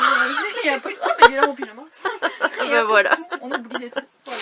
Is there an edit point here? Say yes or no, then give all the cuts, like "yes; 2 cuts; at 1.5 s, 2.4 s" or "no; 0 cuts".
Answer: no; 0 cuts